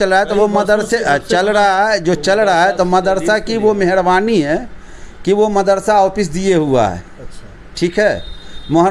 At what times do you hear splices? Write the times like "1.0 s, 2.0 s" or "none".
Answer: none